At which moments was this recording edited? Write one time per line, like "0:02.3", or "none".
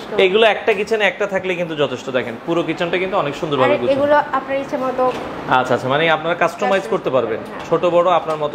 none